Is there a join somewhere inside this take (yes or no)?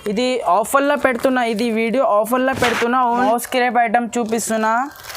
yes